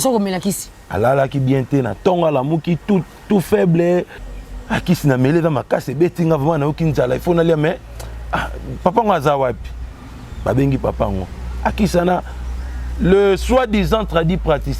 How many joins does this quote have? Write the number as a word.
one